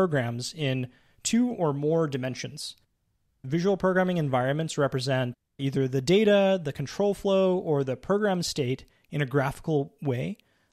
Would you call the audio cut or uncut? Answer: cut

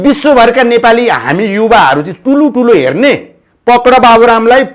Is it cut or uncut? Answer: uncut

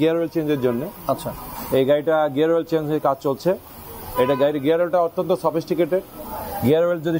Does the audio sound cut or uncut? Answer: uncut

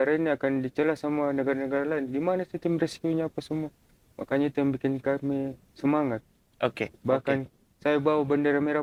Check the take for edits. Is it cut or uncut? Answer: uncut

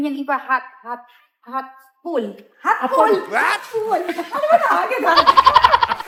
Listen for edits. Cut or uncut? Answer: uncut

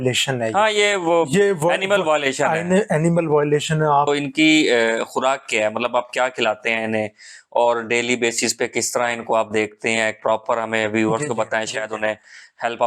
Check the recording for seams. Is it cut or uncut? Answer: cut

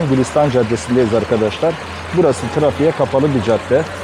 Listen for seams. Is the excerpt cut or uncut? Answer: uncut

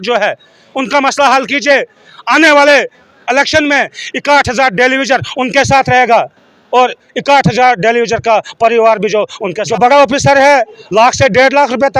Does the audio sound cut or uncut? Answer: cut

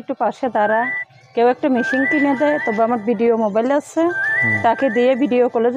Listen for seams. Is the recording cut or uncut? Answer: uncut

